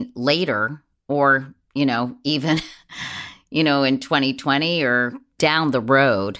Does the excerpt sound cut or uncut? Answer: cut